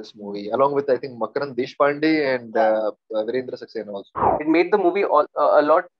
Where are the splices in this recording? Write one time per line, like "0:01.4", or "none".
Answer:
0:04.3

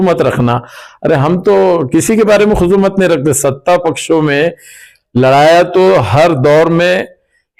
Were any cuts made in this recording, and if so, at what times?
none

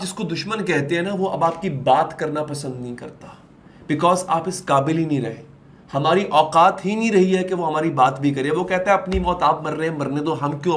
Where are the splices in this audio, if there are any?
none

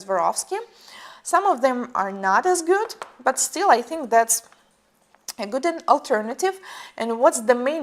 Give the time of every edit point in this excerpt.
0:06.1

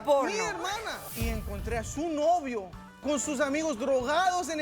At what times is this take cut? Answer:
0:01.0
0:03.0

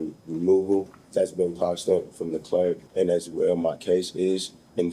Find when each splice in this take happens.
0:01.0
0:02.8

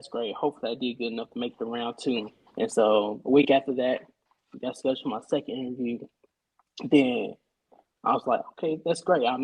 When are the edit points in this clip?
0:02.4

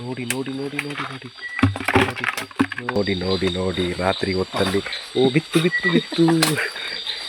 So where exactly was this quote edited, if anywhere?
0:03.0

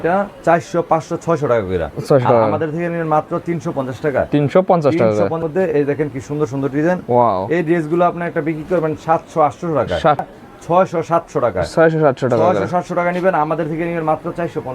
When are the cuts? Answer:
0:05.4
0:10.2

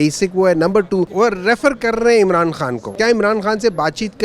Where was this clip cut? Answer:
0:01.1
0:02.8

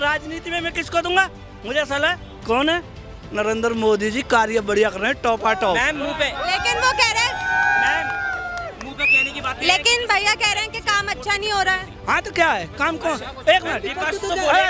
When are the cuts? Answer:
none

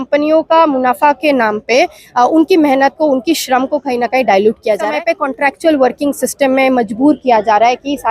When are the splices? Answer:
0:04.9

